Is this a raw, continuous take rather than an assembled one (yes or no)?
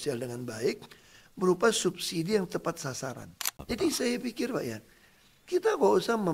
no